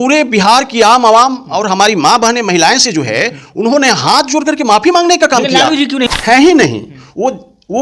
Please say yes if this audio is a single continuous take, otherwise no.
no